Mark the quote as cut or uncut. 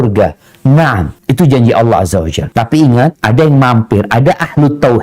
cut